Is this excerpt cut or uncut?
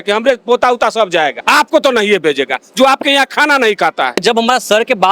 cut